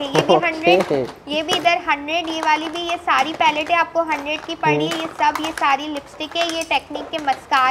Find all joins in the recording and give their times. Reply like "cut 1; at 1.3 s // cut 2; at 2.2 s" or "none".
none